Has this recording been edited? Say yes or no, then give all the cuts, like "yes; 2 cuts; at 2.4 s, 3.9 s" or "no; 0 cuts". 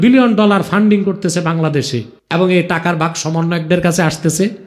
yes; 1 cut; at 2.1 s